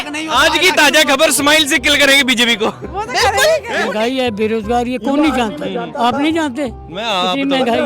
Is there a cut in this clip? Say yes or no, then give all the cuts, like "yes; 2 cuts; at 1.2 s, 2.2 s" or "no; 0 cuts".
yes; 1 cut; at 3.9 s